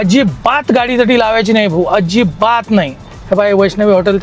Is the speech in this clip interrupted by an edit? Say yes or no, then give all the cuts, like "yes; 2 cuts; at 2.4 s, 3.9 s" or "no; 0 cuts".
no; 0 cuts